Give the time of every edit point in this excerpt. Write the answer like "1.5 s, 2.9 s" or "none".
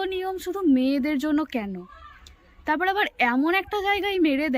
none